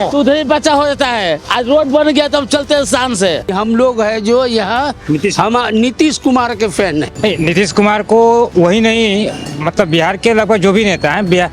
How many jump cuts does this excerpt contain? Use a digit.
2